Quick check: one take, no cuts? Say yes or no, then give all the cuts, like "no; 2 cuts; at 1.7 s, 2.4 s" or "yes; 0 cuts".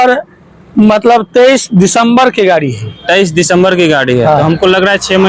yes; 0 cuts